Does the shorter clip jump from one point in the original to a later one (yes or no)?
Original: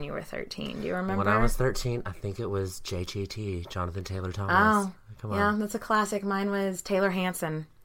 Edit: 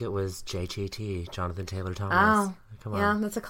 no